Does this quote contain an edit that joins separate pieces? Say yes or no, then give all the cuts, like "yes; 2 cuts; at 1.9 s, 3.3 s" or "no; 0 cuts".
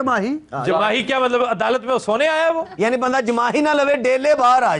no; 0 cuts